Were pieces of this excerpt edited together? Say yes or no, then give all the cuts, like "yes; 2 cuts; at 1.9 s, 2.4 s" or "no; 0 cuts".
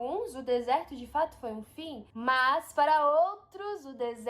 yes; 1 cut; at 2.0 s